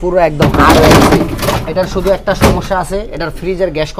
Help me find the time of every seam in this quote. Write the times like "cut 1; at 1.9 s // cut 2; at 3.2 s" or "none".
none